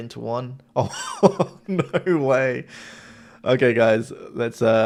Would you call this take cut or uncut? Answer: uncut